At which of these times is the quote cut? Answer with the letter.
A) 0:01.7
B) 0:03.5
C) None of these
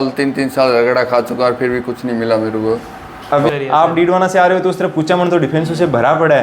B